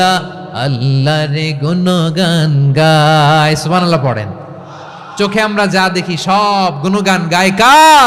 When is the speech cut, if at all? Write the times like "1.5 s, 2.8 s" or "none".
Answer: none